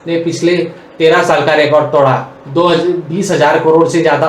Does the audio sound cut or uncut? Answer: uncut